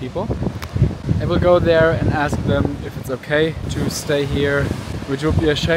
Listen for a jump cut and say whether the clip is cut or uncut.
cut